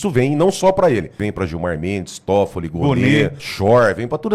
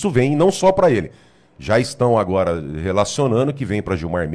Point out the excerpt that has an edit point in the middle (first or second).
first